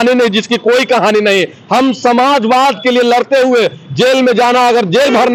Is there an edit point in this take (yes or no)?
no